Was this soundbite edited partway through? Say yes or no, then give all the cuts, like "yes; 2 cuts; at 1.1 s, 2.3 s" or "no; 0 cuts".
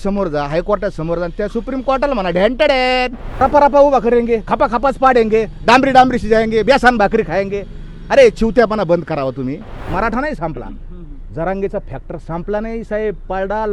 yes; 2 cuts; at 3.4 s, 9.9 s